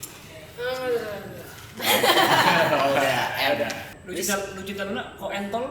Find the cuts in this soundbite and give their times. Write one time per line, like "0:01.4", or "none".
0:03.9